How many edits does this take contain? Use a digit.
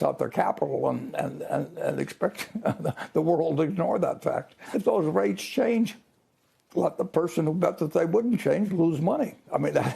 1